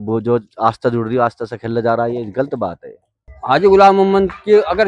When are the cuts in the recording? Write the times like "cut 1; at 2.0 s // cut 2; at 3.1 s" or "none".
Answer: cut 1; at 3.3 s